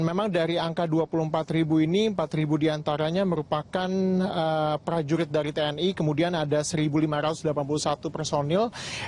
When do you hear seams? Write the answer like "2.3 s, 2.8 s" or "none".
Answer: none